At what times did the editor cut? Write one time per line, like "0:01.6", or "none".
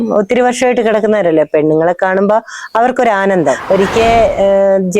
0:03.6